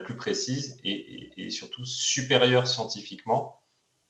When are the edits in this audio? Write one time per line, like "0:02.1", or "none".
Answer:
none